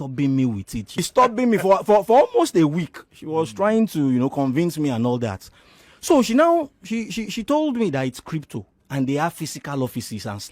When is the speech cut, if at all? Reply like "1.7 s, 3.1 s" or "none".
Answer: 1.0 s